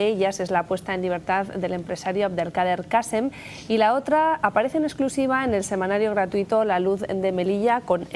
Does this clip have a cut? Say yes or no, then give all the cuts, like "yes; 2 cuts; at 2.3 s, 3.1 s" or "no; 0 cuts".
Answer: yes; 1 cut; at 4.5 s